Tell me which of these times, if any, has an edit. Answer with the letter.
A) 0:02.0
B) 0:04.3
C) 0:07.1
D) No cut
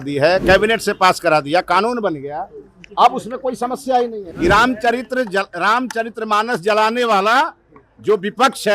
B